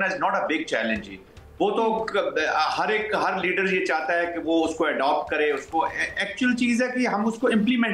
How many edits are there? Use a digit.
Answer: 0